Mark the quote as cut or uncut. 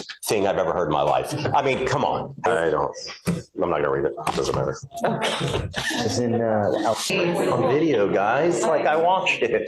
cut